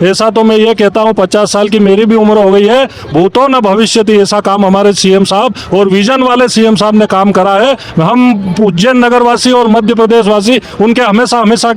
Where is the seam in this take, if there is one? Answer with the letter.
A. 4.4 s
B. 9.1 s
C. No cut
C